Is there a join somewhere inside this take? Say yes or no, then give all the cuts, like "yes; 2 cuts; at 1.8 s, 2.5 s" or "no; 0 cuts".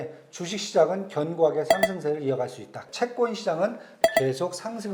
yes; 2 cuts; at 2.9 s, 3.9 s